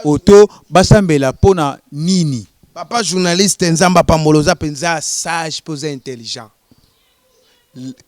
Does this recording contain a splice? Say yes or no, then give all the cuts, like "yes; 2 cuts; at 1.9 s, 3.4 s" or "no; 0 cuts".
no; 0 cuts